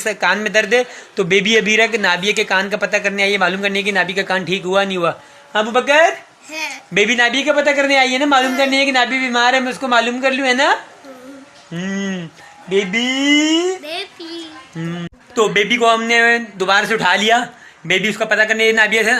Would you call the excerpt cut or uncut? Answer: uncut